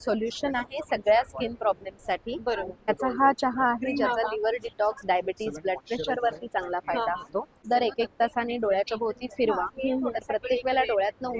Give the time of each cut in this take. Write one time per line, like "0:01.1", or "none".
0:02.9
0:07.6